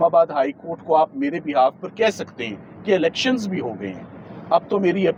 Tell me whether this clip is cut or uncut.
uncut